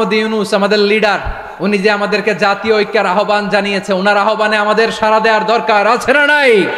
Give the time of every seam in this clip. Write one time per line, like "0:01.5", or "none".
none